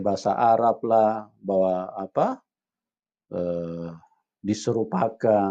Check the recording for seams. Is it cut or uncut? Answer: uncut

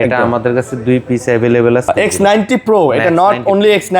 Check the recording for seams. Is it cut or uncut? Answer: cut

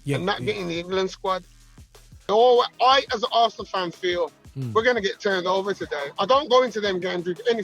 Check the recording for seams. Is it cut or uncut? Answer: cut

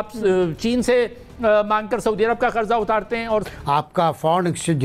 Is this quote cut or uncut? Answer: cut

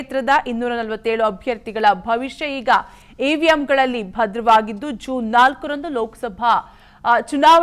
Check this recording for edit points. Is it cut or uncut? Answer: uncut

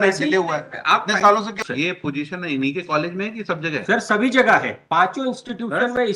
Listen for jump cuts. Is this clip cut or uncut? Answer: cut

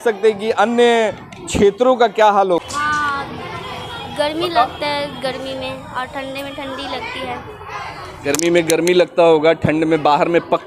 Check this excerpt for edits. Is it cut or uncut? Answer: cut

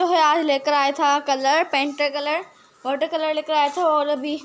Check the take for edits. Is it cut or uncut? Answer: uncut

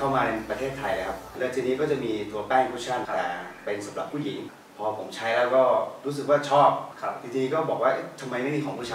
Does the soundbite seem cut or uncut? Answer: cut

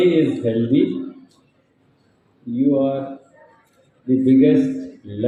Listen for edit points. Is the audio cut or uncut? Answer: uncut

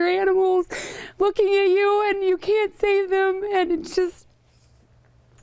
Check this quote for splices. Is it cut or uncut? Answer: uncut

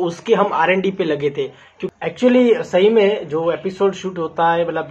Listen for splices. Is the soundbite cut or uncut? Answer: cut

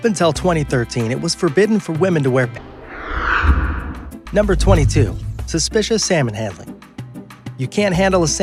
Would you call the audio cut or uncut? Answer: uncut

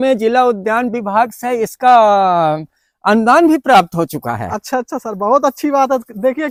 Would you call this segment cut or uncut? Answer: uncut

